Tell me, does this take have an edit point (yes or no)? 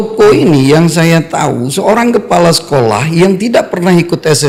no